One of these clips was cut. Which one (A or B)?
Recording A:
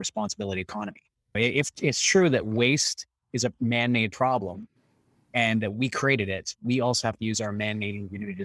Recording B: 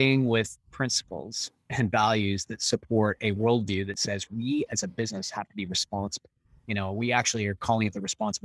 A